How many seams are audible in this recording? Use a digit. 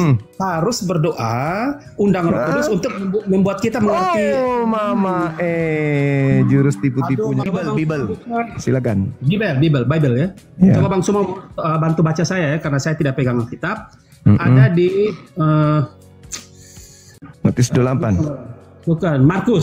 2